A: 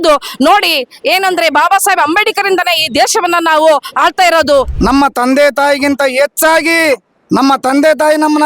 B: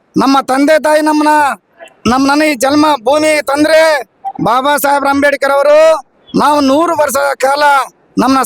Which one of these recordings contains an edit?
A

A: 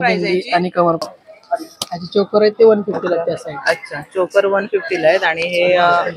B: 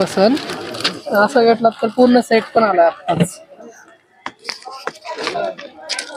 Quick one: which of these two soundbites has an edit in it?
A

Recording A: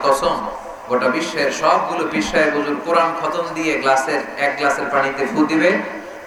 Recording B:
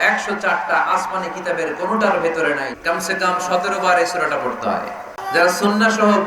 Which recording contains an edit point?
B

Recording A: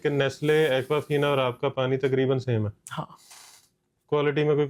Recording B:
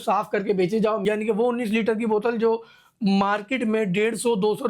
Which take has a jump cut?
B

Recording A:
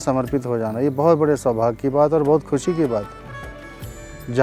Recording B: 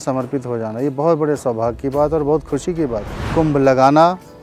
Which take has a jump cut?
B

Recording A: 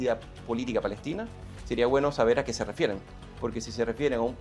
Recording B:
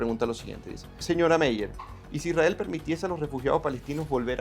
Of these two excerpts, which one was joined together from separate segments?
B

